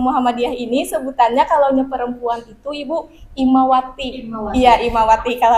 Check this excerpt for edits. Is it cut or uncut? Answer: uncut